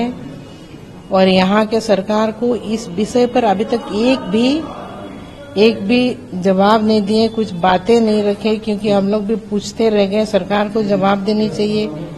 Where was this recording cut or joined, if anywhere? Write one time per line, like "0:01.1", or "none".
none